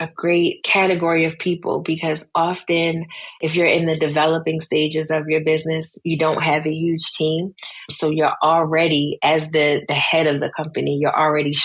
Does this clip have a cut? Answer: no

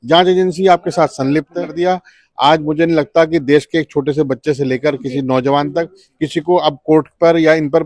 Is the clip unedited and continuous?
no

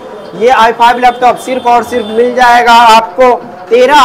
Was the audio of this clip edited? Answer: no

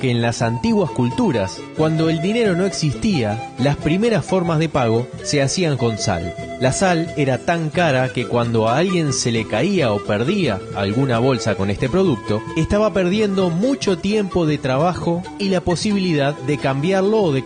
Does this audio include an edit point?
no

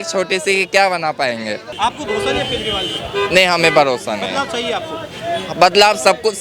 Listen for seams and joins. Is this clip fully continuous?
no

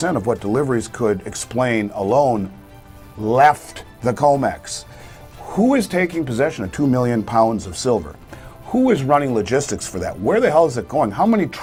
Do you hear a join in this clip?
no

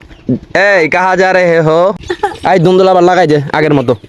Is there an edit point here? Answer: yes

